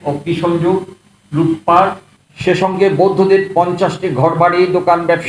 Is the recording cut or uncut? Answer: uncut